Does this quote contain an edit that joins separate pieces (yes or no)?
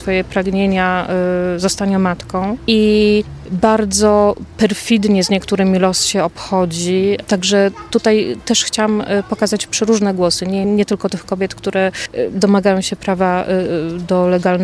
yes